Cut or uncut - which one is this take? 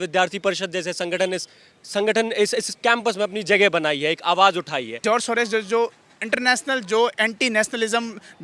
cut